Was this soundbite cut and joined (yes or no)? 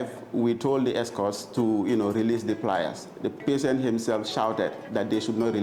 no